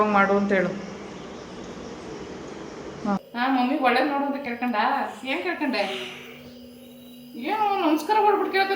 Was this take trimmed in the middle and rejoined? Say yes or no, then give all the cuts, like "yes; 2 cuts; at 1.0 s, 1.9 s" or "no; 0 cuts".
yes; 1 cut; at 3.2 s